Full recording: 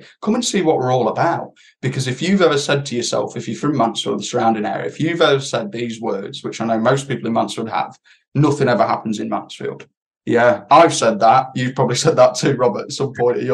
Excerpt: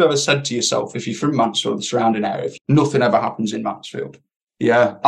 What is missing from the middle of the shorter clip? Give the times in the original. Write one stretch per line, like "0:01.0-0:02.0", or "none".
0:04.9-0:08.1